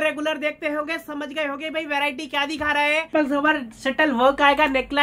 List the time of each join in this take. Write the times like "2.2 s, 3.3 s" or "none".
3.1 s